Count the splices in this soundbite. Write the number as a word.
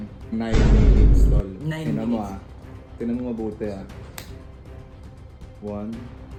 zero